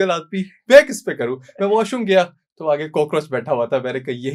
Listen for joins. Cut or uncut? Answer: uncut